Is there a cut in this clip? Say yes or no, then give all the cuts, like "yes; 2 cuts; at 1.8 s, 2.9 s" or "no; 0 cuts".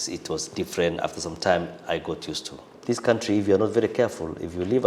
yes; 1 cut; at 2.7 s